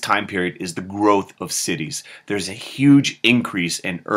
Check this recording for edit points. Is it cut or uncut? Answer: cut